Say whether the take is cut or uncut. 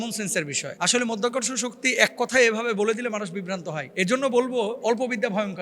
uncut